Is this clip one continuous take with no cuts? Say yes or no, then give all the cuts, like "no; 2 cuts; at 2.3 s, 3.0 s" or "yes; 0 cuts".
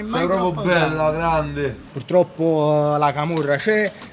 no; 1 cut; at 1.9 s